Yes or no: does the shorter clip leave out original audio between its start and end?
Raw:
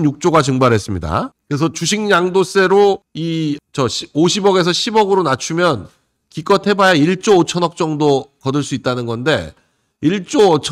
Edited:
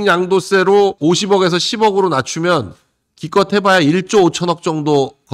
yes